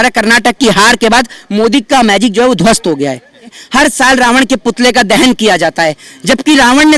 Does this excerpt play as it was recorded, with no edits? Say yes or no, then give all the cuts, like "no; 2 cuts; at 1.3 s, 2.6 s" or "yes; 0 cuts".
no; 1 cut; at 3.5 s